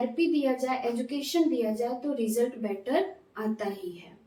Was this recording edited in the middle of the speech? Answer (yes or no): no